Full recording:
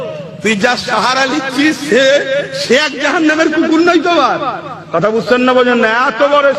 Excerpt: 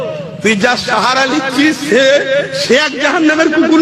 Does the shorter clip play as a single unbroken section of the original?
yes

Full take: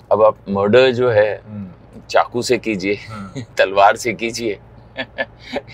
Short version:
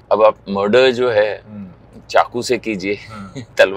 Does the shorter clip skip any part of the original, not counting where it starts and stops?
no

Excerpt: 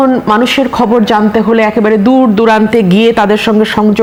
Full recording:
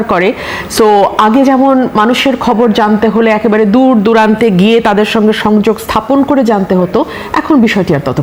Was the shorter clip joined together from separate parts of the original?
no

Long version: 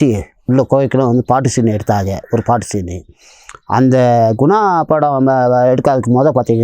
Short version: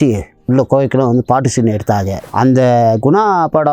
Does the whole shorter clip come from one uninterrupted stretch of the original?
no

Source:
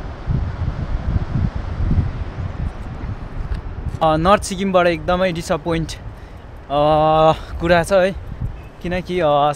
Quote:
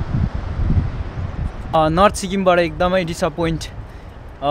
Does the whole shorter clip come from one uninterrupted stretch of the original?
no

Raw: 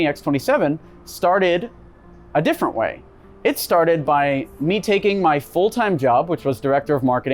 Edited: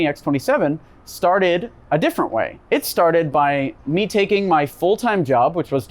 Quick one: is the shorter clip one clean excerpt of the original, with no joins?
no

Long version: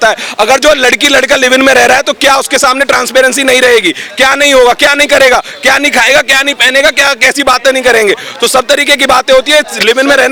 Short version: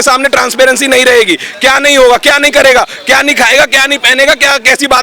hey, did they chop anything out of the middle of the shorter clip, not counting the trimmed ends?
no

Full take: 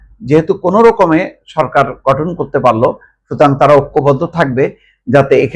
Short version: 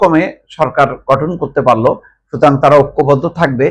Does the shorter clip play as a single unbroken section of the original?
yes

